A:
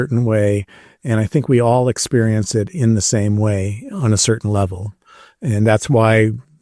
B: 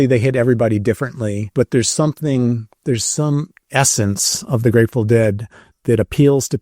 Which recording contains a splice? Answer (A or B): B